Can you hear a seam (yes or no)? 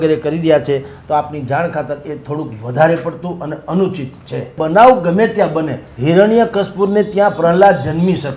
yes